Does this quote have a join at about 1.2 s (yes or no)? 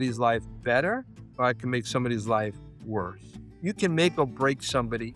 yes